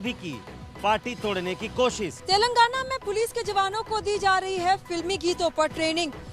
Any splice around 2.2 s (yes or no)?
yes